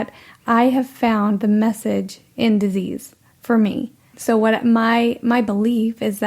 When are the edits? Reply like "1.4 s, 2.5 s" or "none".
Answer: 4.2 s